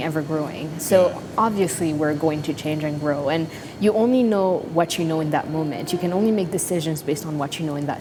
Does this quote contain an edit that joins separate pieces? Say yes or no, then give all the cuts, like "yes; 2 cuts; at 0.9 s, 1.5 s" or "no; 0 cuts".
no; 0 cuts